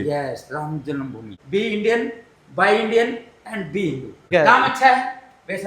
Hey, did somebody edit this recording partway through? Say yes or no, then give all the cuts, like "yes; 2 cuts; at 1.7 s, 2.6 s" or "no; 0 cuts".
yes; 2 cuts; at 1.3 s, 4.3 s